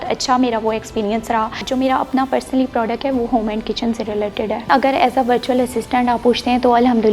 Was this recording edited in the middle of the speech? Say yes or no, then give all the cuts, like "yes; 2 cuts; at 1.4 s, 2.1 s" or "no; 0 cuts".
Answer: yes; 2 cuts; at 1.6 s, 4.7 s